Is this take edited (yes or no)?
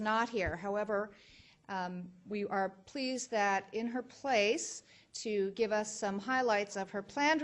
no